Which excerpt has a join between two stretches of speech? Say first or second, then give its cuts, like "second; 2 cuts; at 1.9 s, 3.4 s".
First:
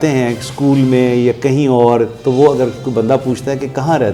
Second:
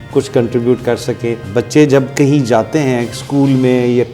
second; 1 cut; at 1.4 s